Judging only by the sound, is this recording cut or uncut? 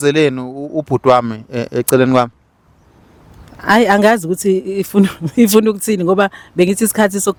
uncut